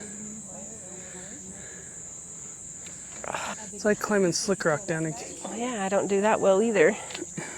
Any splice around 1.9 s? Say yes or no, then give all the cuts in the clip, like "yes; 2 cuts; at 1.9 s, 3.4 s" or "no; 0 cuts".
no; 1 cut; at 3.5 s